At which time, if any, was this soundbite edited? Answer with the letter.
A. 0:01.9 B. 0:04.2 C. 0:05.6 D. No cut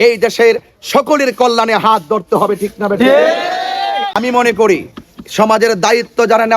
B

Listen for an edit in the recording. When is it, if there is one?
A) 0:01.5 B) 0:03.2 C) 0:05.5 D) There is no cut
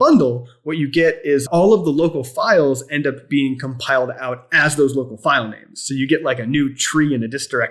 A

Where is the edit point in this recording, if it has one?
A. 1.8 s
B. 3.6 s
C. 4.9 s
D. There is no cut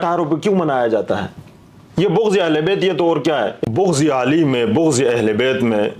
B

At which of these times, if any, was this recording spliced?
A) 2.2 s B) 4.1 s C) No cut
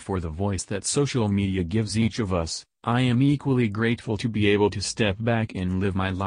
A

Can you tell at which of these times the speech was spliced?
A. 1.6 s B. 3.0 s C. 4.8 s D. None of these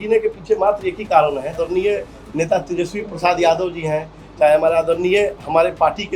A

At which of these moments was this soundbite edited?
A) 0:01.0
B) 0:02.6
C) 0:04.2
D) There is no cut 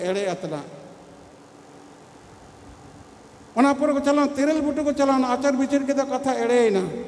D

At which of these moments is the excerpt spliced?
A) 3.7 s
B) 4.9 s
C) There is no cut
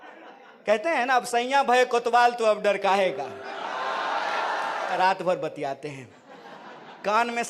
B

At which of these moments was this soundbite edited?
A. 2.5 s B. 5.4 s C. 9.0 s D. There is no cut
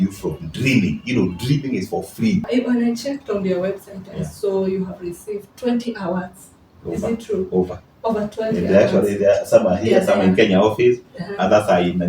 A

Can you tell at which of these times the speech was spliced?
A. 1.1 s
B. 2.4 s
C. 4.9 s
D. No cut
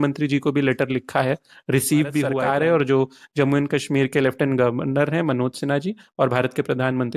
B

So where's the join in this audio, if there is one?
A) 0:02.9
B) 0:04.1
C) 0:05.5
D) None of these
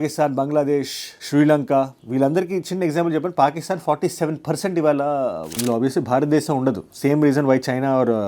C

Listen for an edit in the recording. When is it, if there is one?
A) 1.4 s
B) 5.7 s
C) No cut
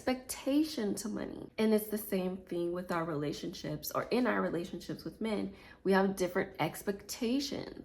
A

